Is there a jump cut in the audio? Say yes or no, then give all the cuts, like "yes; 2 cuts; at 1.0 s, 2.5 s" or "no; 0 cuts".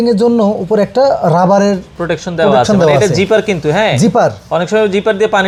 no; 0 cuts